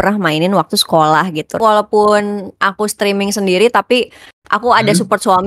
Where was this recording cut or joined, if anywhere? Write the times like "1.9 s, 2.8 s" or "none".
1.6 s